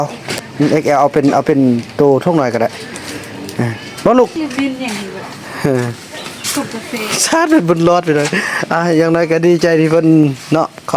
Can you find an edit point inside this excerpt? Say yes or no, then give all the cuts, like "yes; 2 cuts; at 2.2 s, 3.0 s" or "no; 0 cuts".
yes; 1 cut; at 4.3 s